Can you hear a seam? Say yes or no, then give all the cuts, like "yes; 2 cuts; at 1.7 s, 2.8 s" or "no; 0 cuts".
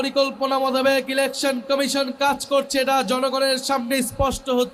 no; 0 cuts